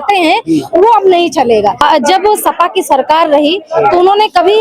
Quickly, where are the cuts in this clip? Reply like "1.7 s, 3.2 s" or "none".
1.8 s